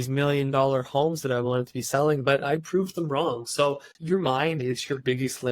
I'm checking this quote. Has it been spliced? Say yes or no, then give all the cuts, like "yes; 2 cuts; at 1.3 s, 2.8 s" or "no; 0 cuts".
yes; 1 cut; at 3.9 s